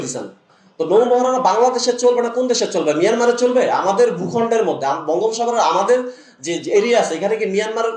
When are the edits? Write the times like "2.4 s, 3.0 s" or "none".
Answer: 1.0 s